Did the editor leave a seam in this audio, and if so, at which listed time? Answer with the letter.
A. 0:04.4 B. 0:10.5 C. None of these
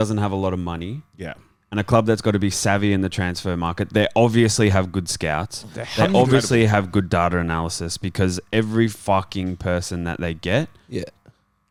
C